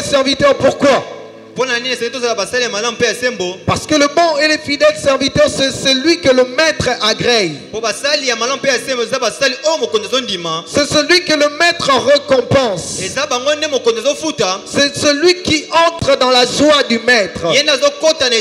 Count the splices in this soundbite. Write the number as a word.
zero